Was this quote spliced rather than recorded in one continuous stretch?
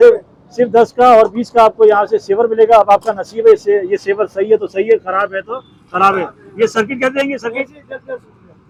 no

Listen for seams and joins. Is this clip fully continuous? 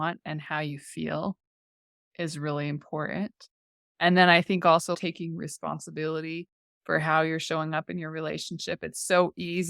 no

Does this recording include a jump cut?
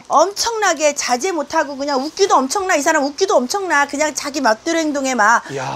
no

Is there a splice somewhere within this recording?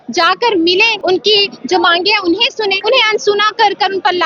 yes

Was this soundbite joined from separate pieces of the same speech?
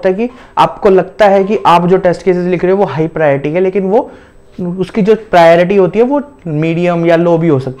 no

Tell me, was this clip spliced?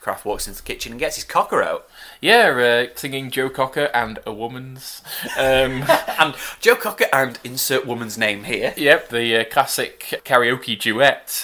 yes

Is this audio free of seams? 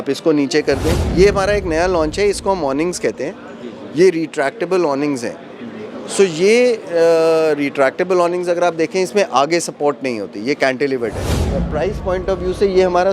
no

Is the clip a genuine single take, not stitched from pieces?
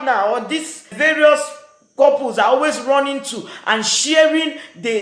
no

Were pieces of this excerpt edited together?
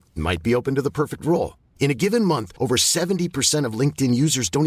no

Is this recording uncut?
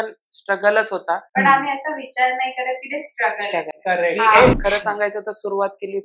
no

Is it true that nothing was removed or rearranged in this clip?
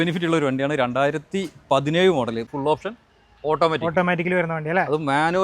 no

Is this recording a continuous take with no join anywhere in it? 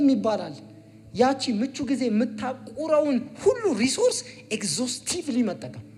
yes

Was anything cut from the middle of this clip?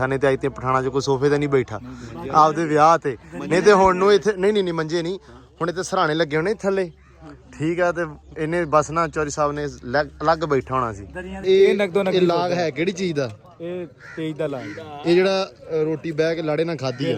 yes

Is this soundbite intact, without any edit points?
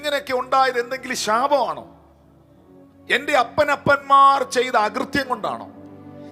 yes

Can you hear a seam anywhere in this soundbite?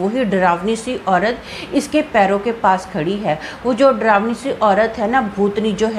no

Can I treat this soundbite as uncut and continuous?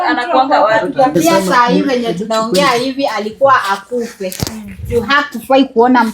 no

